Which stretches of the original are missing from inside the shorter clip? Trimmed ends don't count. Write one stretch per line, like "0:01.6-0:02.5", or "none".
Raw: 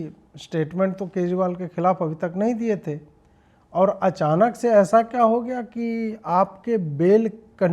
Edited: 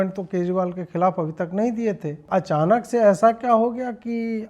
0:03.1-0:04.0